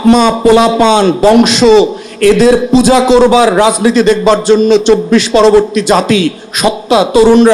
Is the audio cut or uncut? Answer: uncut